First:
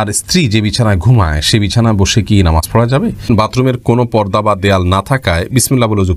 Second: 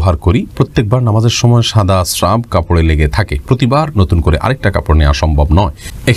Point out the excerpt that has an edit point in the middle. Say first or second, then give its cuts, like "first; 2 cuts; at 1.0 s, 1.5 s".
first; 1 cut; at 3.3 s